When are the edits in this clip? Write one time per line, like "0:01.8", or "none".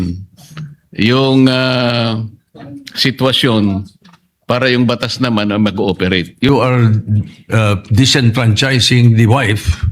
0:06.5